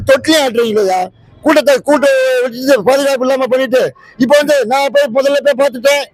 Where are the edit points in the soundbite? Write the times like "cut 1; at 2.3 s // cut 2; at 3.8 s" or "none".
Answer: none